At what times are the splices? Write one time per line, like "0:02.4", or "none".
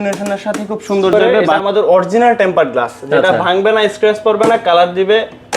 0:01.5